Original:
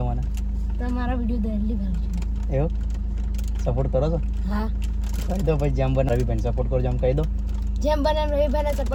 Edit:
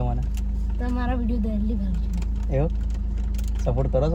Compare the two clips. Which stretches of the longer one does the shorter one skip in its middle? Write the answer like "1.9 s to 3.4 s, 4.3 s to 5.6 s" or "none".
none